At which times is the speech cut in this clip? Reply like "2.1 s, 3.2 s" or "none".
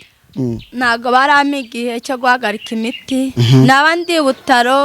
3.3 s